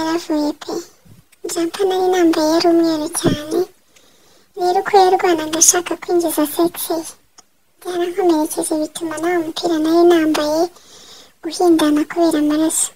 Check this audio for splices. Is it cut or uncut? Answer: uncut